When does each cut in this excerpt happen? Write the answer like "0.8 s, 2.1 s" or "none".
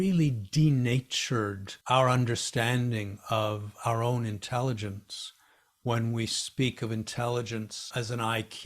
1.7 s